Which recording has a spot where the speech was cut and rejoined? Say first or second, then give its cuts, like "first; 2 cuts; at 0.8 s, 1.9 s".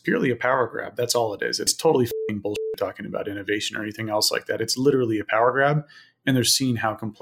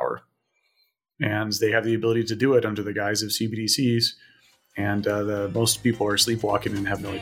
first; 1 cut; at 1.7 s